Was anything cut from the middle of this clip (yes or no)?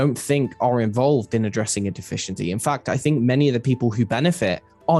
no